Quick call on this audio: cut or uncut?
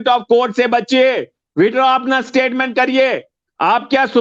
uncut